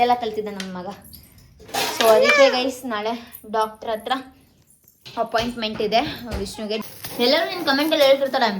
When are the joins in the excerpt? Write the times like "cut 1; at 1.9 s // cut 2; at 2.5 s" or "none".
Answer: cut 1; at 6.8 s